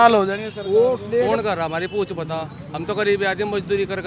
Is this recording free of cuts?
yes; 0 cuts

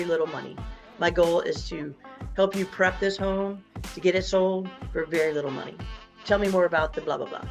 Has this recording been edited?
no; 0 cuts

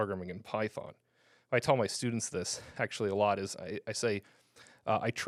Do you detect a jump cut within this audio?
no; 0 cuts

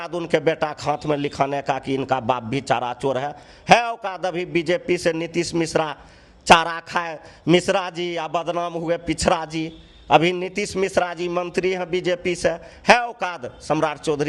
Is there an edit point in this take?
no; 0 cuts

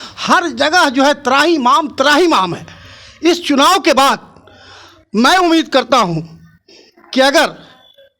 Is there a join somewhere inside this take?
no; 0 cuts

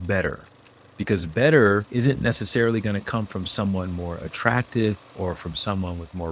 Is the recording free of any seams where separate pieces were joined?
no; 1 cut; at 1.9 s

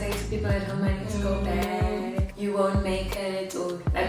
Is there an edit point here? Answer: yes; 1 cut; at 2.3 s

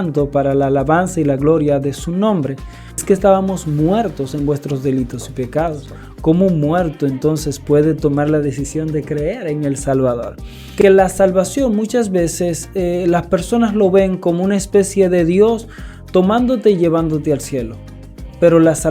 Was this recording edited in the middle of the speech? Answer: yes; 2 cuts; at 3.0 s, 10.8 s

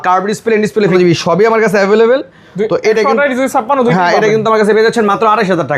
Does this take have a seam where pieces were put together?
yes; 1 cut; at 1.0 s

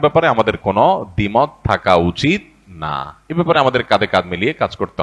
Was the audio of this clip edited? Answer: no; 0 cuts

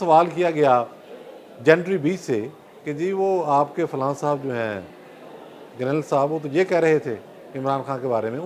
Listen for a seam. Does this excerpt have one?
no; 0 cuts

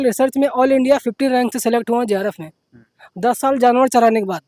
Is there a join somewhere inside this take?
no; 0 cuts

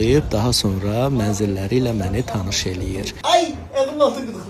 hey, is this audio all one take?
yes; 0 cuts

